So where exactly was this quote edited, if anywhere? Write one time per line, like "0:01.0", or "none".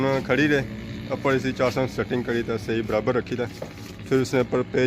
none